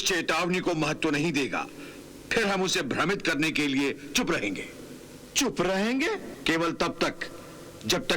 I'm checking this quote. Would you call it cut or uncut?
cut